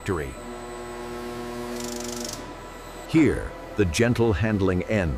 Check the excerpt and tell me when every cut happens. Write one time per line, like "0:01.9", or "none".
none